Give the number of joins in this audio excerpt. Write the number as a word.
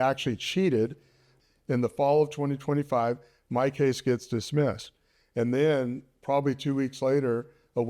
one